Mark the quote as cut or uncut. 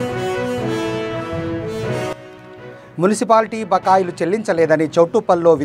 cut